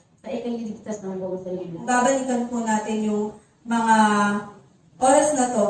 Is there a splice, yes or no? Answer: yes